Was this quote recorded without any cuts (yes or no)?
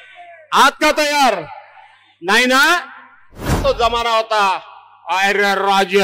no